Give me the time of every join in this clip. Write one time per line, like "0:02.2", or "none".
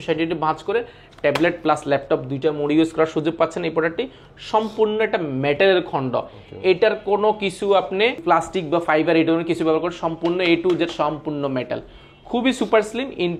none

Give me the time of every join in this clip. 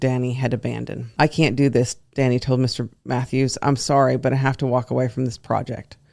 0:01.0

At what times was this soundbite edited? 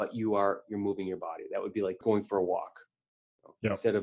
0:02.0

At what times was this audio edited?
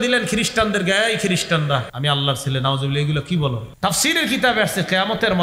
0:01.9
0:03.7

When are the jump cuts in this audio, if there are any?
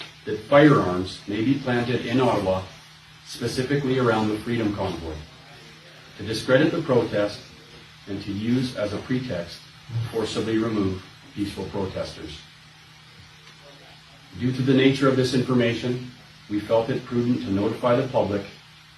none

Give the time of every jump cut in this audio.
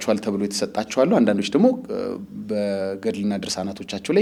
none

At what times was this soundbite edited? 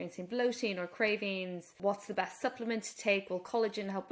0:01.7

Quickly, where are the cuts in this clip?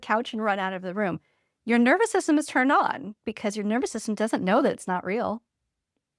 0:03.2

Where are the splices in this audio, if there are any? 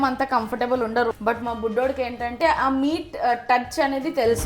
0:01.1
0:02.4

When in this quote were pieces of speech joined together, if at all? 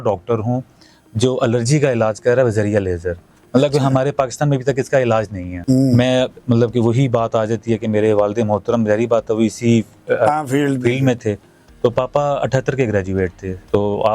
none

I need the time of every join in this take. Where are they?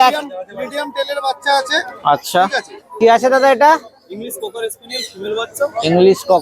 0:02.8

